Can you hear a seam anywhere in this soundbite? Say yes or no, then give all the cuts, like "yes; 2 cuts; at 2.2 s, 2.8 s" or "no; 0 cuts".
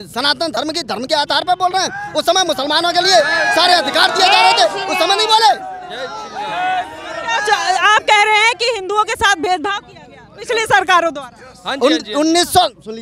no; 0 cuts